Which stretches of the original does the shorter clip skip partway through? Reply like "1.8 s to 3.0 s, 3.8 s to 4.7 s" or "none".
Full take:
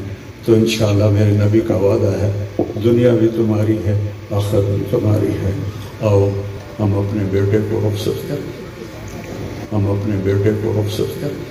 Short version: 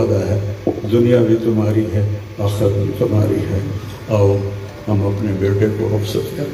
6.6 s to 9.5 s